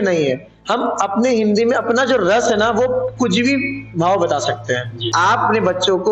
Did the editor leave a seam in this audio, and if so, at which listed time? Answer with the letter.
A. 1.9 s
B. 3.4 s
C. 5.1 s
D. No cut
C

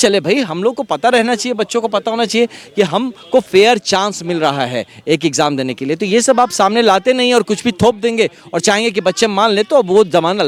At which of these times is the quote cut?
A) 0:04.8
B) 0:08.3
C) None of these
C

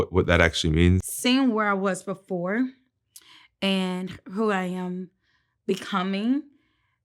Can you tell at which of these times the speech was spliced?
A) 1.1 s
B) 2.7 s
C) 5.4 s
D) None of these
A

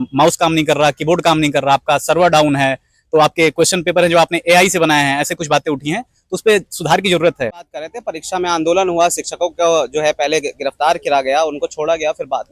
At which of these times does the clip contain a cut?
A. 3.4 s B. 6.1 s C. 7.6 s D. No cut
C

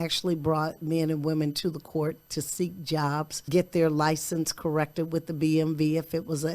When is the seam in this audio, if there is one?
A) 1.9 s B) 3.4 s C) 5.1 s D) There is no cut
B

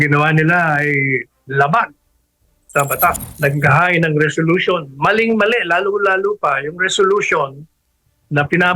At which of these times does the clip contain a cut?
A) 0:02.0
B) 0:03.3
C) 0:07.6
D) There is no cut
B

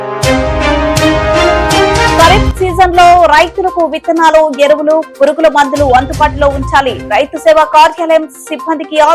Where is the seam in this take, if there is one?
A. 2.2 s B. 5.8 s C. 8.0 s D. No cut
D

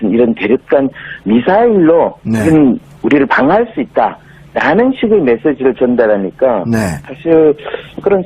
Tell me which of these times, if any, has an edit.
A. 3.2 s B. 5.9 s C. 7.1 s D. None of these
B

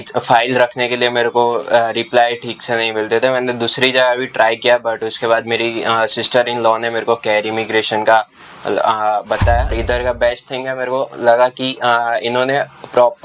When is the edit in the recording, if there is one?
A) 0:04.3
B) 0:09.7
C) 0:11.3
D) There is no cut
B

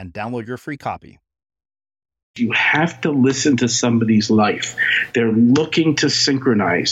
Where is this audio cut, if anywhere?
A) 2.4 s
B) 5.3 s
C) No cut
A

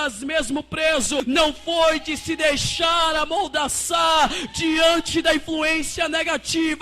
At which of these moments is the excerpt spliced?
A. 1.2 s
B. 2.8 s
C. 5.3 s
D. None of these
A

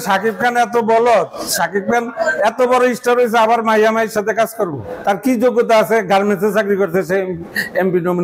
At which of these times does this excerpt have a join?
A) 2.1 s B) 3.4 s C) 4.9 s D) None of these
C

